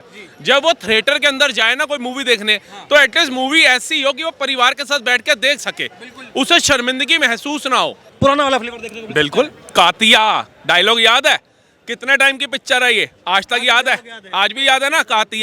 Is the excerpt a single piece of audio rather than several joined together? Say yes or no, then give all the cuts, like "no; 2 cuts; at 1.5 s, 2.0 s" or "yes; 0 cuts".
no; 1 cut; at 8.1 s